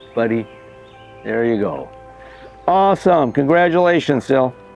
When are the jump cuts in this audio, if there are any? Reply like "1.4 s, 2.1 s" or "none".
none